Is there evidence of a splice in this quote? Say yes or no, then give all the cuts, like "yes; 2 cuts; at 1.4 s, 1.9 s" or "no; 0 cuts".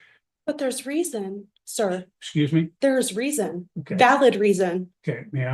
no; 0 cuts